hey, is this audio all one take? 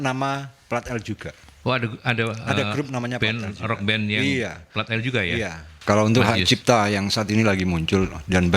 no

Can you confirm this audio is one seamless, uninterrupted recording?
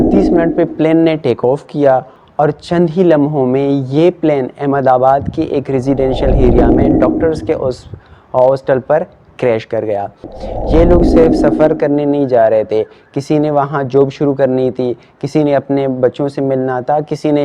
no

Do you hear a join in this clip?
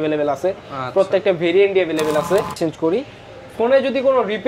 yes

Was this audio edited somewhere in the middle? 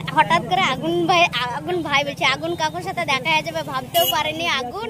no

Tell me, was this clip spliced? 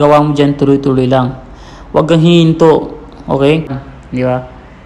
yes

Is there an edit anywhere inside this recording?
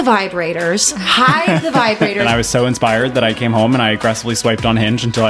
yes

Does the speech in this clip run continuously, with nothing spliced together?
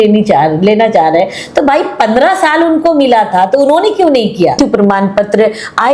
no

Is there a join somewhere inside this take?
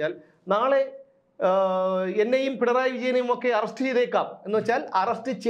no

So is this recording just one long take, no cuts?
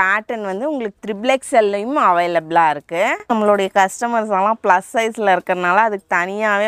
no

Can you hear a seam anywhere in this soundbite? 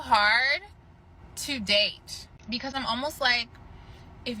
yes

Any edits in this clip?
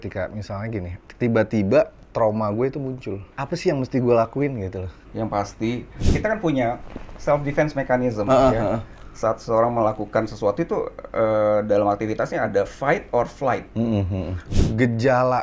yes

